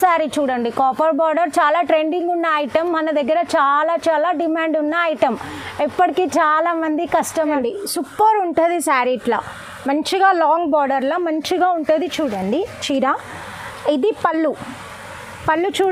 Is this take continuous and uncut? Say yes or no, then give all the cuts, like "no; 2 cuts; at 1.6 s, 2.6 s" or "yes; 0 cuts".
yes; 0 cuts